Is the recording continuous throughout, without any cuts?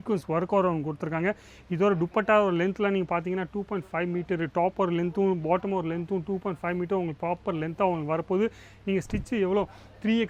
yes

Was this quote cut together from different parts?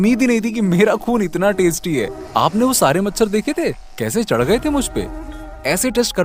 no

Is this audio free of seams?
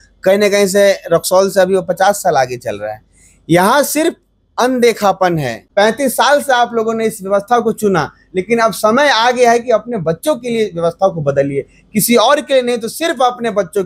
no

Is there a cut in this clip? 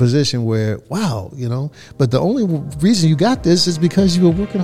no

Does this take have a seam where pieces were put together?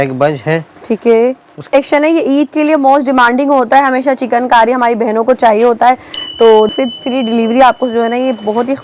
yes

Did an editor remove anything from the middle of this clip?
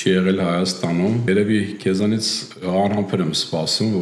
yes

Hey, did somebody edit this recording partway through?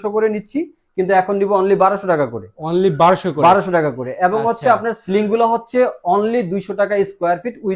no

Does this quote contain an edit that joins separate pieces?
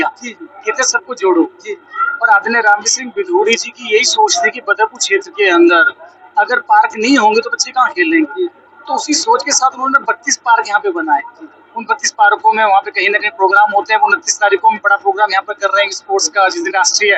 no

